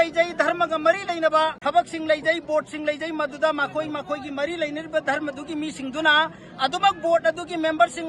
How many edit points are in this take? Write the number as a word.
one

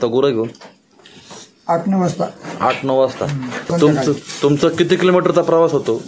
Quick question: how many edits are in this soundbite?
one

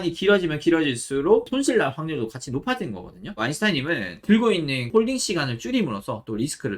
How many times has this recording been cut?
two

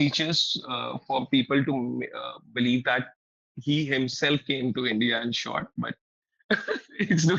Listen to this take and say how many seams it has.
zero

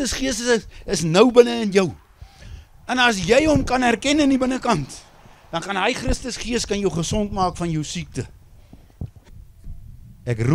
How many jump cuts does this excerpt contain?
one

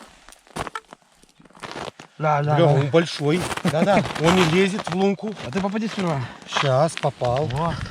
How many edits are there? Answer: one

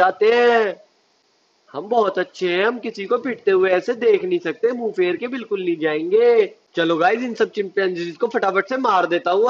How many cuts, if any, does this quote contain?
zero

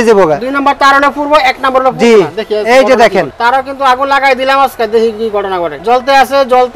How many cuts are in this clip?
two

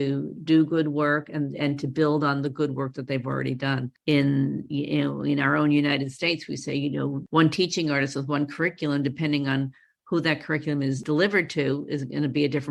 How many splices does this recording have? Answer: one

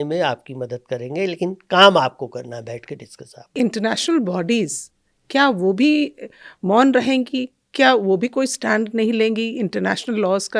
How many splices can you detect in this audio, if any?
one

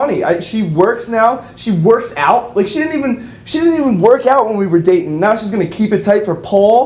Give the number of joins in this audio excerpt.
zero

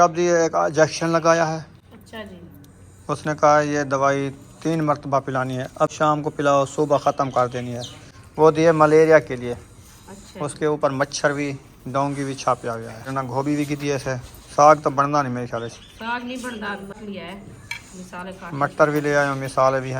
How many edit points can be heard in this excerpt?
three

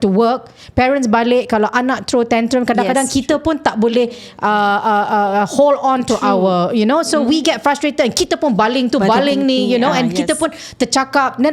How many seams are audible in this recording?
zero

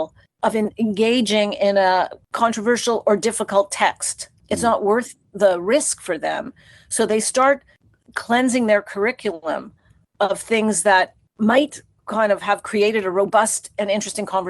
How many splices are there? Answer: one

